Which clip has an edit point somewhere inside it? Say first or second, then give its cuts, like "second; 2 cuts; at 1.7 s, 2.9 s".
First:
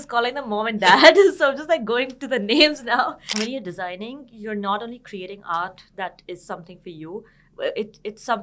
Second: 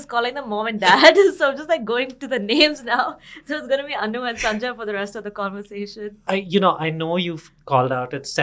first; 1 cut; at 3.2 s